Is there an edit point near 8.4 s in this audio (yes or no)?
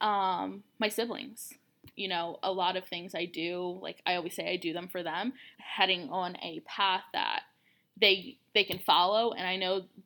no